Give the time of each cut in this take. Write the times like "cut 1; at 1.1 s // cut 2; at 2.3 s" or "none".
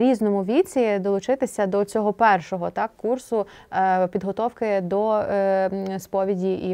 none